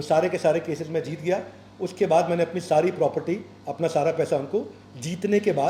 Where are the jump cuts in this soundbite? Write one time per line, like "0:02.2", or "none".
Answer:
none